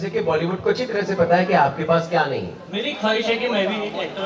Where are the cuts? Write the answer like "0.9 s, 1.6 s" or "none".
2.6 s